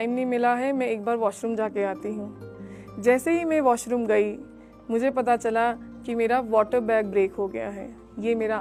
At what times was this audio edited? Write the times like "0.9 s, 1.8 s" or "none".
none